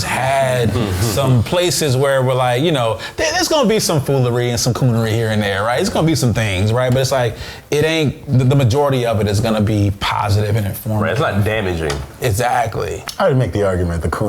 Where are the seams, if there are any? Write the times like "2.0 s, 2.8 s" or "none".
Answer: 13.0 s